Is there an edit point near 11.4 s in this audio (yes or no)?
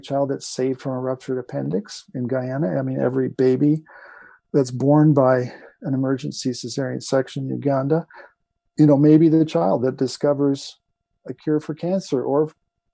no